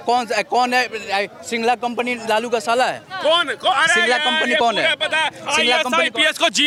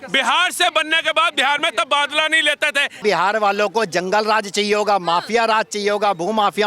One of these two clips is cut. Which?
second; 1 cut; at 3.0 s

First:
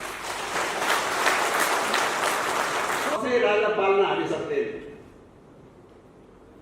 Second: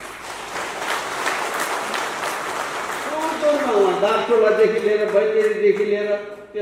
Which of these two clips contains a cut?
first; 1 cut; at 3.2 s

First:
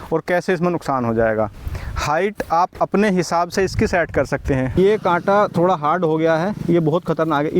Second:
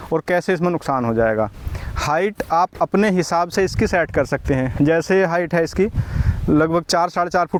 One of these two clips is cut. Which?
first; 1 cut; at 4.8 s

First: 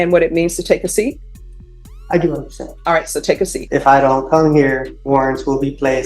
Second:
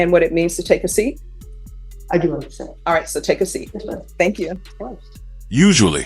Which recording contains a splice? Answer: first; 2 cuts; at 3.6 s, 4.9 s

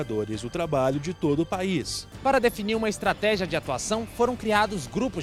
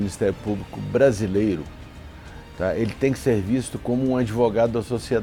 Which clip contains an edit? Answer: first; 1 cut; at 2.0 s

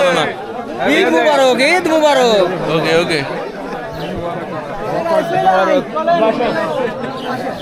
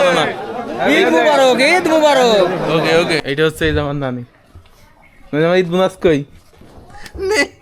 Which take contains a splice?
second; 1 cut; at 3.2 s

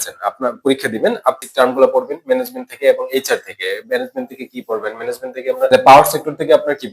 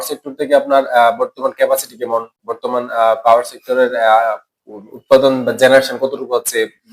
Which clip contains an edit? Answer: first; 2 cuts; at 1.4 s, 5.7 s

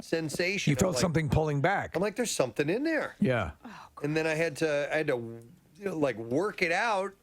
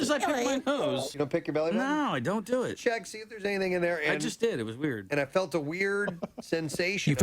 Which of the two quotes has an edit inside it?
second; 1 cut; at 1.1 s

